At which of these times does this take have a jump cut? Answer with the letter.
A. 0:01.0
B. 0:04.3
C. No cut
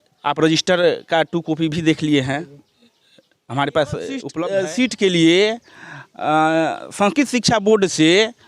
B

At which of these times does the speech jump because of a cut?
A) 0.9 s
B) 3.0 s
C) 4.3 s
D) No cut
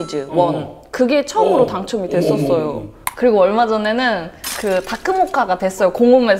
B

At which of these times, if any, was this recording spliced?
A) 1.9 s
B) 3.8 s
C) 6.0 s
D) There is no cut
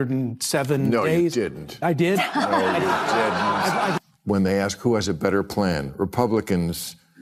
B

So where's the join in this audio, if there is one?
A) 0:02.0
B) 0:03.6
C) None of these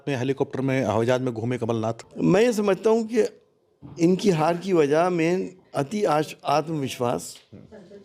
A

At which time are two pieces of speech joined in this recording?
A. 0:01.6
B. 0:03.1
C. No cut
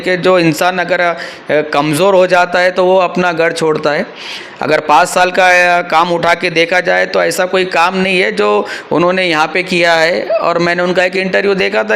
C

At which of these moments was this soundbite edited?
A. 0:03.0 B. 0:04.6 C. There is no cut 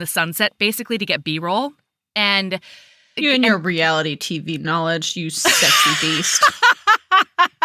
C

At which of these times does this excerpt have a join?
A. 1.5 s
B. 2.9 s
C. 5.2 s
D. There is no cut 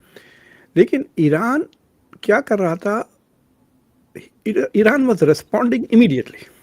D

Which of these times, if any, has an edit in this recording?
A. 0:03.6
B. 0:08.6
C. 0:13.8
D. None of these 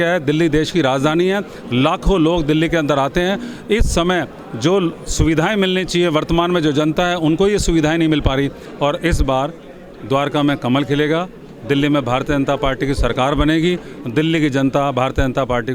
B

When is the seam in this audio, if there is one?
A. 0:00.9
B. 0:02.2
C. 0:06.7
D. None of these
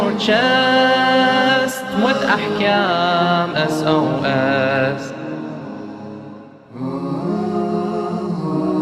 D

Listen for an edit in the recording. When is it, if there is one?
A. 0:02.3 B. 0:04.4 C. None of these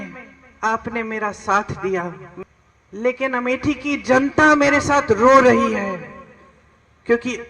A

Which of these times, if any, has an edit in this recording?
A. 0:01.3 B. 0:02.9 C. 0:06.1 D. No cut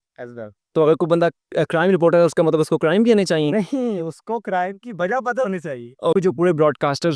C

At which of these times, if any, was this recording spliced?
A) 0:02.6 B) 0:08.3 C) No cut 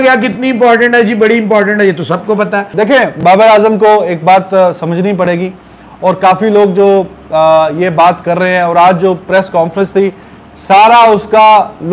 A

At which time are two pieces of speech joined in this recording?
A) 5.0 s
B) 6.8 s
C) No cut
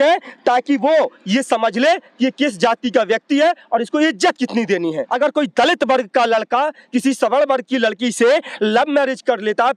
A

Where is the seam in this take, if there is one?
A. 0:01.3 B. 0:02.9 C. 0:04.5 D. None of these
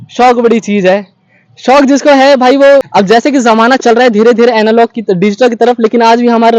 B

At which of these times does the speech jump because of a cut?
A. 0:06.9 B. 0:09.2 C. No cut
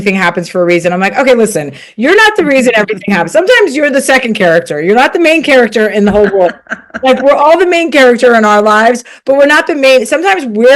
C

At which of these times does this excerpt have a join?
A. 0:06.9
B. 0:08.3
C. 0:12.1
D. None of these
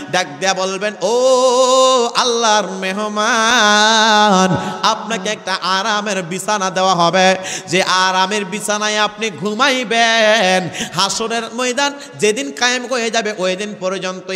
D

